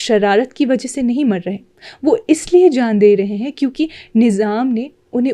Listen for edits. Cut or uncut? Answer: uncut